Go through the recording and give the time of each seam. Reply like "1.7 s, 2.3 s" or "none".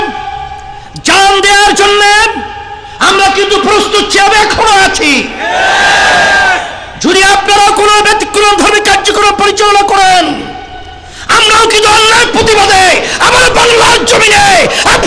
none